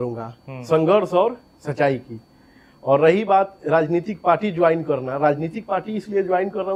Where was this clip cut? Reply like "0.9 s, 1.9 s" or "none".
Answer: none